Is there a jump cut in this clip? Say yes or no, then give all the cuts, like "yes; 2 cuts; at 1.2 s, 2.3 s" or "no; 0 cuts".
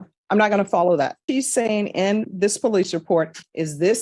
yes; 1 cut; at 1.2 s